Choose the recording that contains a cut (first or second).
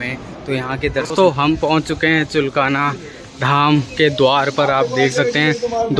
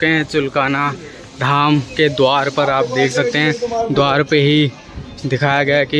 first